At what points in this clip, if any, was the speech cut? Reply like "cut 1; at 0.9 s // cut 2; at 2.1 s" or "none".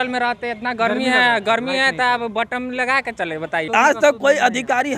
cut 1; at 3.6 s

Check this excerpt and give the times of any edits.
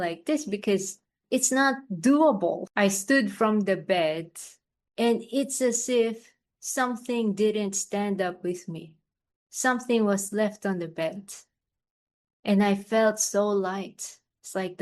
cut 1; at 2.7 s

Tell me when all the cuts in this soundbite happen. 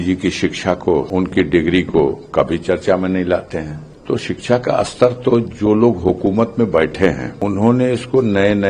cut 1; at 1.1 s // cut 2; at 4.2 s // cut 3; at 7.3 s

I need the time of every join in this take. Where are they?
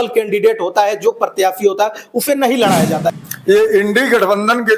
cut 1; at 3.2 s

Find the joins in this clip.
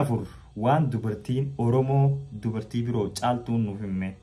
none

